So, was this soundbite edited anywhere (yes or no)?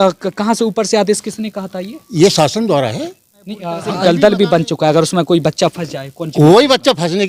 yes